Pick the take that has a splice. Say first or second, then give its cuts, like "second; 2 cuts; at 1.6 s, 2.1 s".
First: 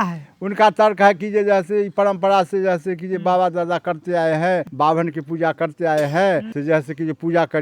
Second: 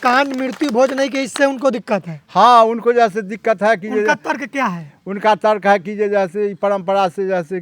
first; 2 cuts; at 4.7 s, 6.5 s